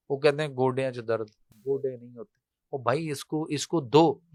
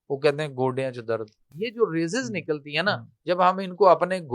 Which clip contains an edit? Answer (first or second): second